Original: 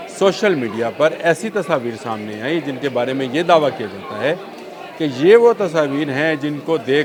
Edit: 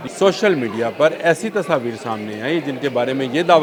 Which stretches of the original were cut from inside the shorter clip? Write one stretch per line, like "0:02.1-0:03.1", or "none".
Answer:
none